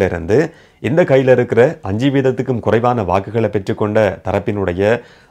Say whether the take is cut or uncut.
uncut